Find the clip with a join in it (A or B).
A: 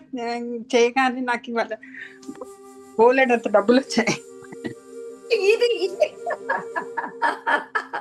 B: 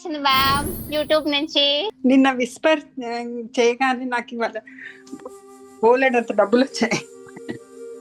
B